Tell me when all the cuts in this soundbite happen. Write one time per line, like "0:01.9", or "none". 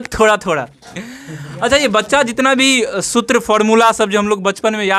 none